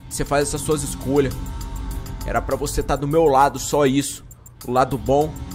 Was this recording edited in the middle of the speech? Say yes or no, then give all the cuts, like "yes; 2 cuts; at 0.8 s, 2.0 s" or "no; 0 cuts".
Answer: no; 0 cuts